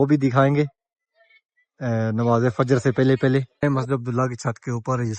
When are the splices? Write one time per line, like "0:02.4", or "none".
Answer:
0:03.5